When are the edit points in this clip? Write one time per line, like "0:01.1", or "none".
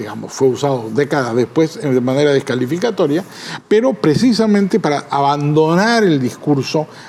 none